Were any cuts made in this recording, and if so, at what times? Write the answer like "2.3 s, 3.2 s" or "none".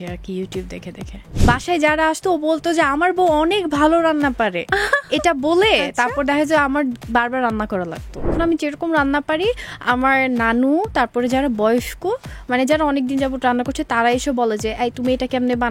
1.3 s, 8.3 s